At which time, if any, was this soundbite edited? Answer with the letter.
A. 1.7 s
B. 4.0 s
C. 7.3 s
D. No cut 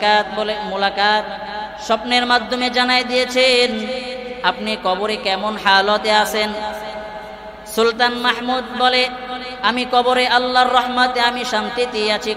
A